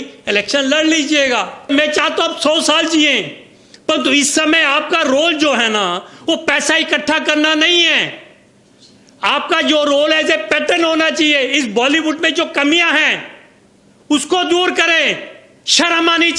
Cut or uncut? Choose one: cut